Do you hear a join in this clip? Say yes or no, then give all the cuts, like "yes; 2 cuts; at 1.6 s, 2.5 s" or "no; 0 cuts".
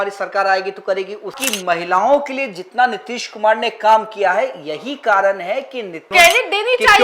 yes; 2 cuts; at 1.4 s, 6.0 s